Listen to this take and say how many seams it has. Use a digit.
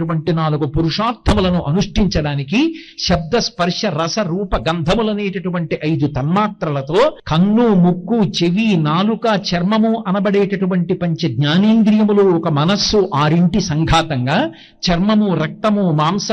1